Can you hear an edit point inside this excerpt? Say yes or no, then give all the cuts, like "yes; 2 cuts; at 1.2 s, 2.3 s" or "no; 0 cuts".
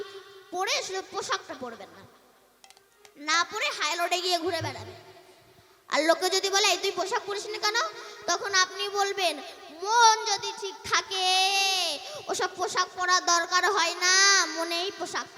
no; 0 cuts